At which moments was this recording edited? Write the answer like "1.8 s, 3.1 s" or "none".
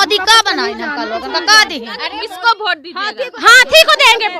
2.1 s